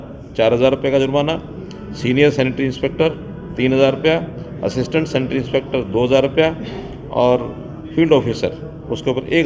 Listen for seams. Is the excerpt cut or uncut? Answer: uncut